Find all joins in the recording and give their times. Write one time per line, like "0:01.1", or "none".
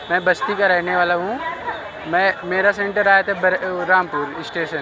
none